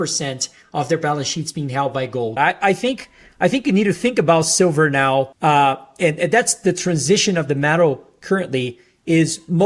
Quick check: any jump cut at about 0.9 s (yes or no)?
no